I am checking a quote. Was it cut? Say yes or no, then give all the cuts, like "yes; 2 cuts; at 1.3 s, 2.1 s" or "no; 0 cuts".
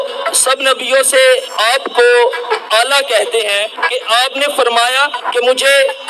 yes; 3 cuts; at 1.6 s, 3.8 s, 5.3 s